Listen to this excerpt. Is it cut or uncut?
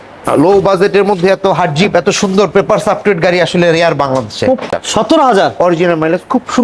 cut